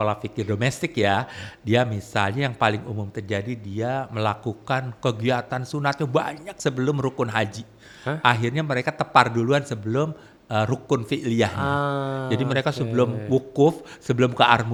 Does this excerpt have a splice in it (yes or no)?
no